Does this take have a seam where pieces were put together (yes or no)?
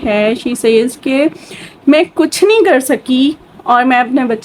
no